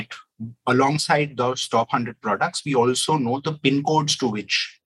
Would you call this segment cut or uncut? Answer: uncut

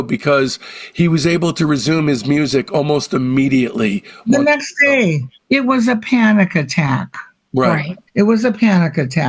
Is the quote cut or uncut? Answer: cut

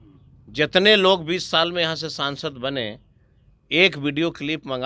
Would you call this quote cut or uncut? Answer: uncut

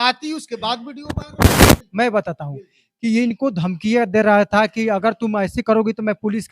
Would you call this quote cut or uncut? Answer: cut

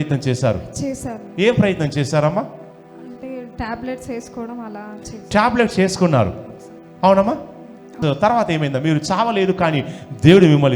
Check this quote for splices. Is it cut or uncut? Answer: cut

